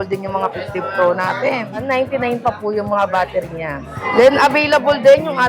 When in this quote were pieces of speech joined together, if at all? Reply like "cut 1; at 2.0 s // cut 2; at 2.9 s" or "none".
cut 1; at 1.8 s // cut 2; at 3.9 s